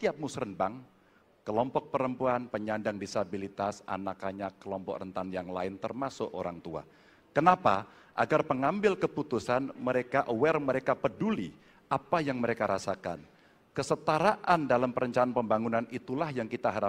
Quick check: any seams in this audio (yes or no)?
no